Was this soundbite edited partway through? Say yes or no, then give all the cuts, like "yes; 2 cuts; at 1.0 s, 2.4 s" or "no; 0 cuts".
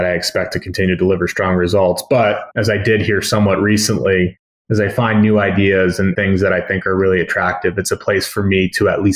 no; 0 cuts